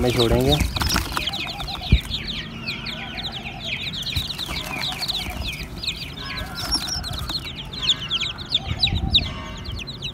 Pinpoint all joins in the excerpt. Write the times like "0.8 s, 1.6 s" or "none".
none

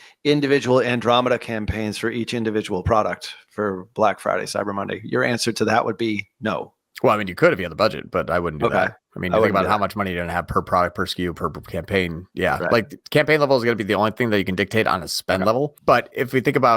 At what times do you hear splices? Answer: 15.8 s

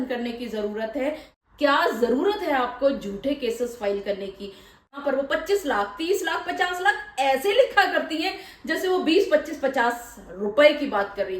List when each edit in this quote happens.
1.3 s, 5.0 s

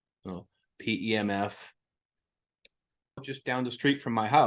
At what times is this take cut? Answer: 3.2 s

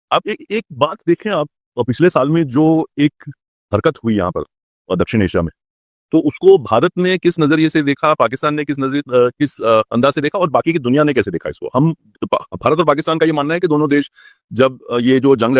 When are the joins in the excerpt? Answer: none

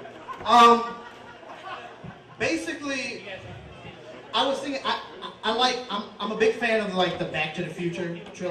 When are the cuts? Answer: 3.8 s

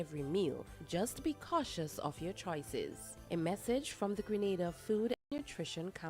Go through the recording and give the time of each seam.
5.2 s

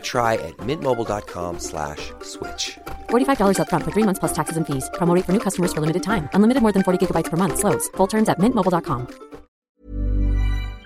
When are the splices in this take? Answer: 9.6 s

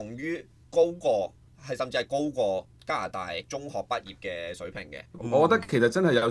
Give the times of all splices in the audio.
5.2 s

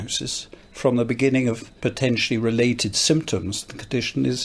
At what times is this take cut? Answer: 1.7 s

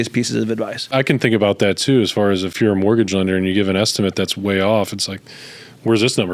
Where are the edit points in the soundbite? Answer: 0.9 s, 2.5 s

